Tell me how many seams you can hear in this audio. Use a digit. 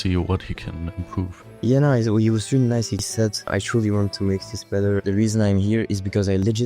1